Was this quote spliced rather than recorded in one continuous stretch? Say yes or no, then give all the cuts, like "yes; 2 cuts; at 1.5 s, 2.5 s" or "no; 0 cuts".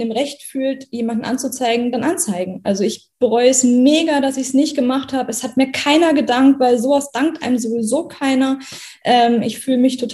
no; 0 cuts